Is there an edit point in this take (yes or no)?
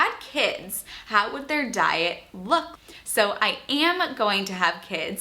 yes